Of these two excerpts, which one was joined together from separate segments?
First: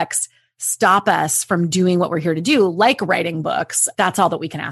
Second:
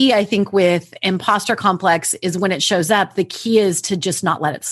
first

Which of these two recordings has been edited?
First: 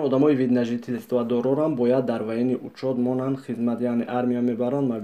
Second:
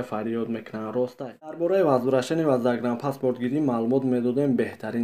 second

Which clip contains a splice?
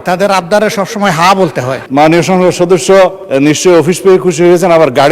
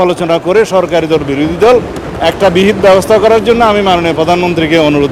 first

